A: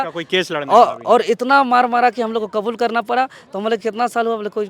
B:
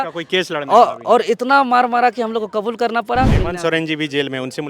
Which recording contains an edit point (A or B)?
B